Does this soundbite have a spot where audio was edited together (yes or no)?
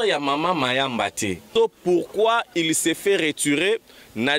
yes